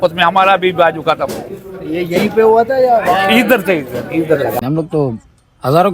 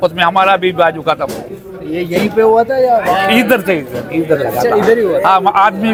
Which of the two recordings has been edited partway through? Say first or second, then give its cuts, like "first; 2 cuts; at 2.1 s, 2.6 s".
first; 1 cut; at 4.6 s